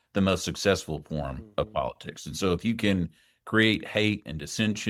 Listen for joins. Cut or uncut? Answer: uncut